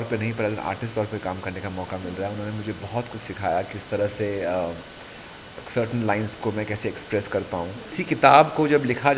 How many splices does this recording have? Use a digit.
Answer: 1